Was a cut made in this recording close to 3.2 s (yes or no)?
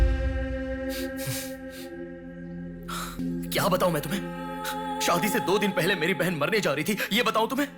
yes